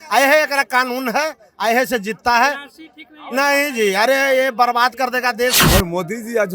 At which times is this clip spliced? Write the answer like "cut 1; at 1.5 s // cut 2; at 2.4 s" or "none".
cut 1; at 5.6 s